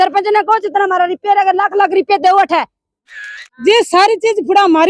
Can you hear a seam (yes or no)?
yes